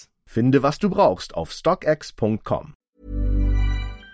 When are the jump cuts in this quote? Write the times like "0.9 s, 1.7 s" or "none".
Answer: 2.7 s